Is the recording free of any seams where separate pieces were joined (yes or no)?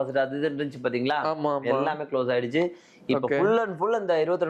yes